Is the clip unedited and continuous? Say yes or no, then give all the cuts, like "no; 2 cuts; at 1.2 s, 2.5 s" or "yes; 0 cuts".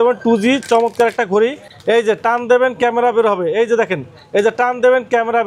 no; 1 cut; at 1.7 s